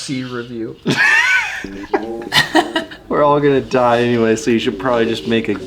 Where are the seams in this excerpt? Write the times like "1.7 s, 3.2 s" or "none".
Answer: 3.0 s